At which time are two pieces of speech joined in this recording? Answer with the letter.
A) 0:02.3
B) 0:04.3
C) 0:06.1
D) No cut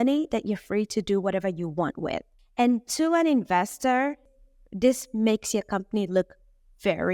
B